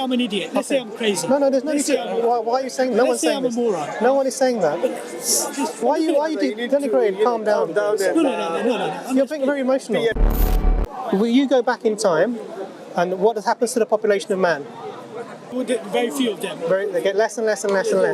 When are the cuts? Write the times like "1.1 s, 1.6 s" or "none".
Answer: 10.5 s, 15.5 s